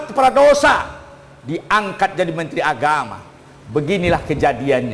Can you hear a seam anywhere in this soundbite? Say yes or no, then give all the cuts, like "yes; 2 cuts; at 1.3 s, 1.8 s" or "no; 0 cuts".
no; 0 cuts